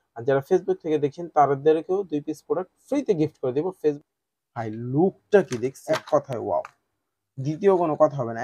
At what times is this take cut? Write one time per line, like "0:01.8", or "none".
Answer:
0:03.8
0:05.8